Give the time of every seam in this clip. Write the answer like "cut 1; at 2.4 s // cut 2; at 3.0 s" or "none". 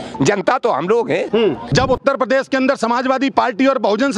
cut 1; at 1.7 s